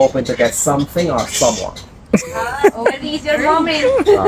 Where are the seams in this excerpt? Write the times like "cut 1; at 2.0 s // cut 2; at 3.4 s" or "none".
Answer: none